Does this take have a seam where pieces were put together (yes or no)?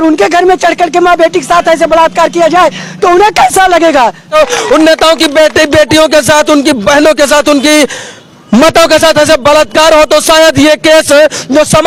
no